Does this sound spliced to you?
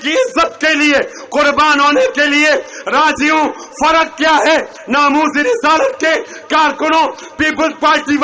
no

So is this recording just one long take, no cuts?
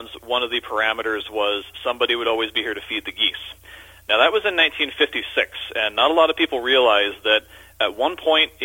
yes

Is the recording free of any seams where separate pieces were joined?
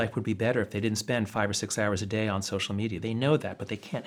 yes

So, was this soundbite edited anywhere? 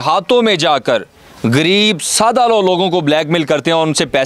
no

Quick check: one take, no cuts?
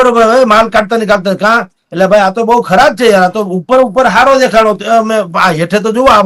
yes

